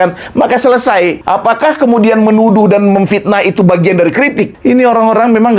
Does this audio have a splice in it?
yes; 2 cuts; at 1.2 s, 4.5 s

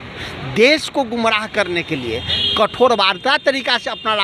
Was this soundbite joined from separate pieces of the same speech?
no; 0 cuts

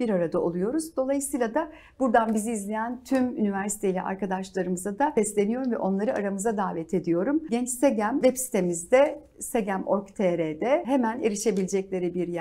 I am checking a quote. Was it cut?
yes; 4 cuts; at 5.1 s, 7.5 s, 8.2 s, 10.8 s

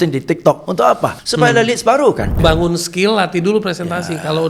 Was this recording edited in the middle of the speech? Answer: yes; 2 cuts; at 1.2 s, 2.4 s

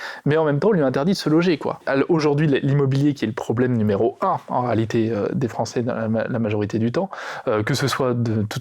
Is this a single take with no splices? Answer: no; 1 cut; at 1.8 s

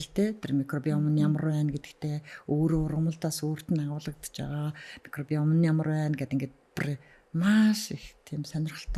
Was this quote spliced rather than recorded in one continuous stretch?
no; 0 cuts

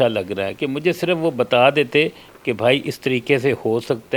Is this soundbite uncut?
yes; 0 cuts

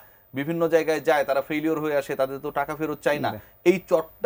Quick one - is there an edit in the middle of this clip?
no; 0 cuts

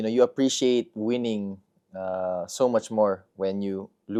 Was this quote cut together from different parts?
no; 0 cuts

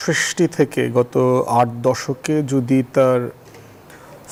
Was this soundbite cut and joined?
no; 0 cuts

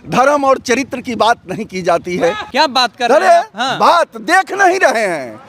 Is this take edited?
yes; 1 cut; at 2.4 s

